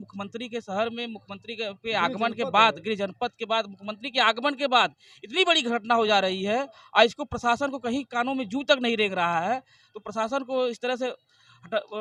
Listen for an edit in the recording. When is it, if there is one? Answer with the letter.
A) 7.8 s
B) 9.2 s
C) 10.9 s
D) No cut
D